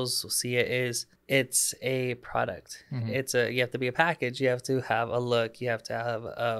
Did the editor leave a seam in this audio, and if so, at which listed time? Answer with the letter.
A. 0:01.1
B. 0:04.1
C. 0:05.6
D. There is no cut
A